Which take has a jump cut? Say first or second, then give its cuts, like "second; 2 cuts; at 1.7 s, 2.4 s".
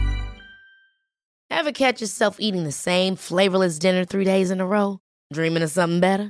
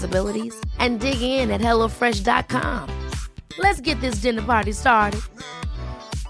first; 1 cut; at 1.3 s